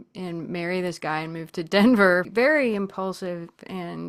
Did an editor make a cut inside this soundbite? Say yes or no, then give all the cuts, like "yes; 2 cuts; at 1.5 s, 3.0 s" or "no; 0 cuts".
yes; 1 cut; at 2.3 s